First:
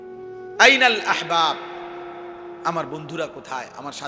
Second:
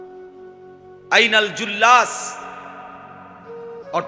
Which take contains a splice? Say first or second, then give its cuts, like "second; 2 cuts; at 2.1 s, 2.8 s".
second; 1 cut; at 1.0 s